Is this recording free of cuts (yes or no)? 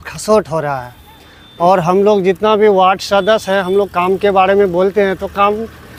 yes